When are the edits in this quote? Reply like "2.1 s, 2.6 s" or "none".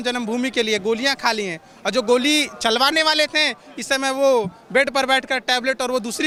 none